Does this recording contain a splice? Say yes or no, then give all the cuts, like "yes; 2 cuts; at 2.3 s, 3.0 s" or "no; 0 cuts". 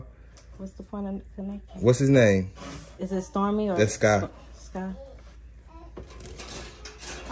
no; 0 cuts